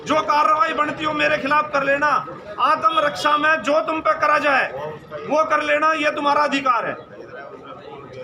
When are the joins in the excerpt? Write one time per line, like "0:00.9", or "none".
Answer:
none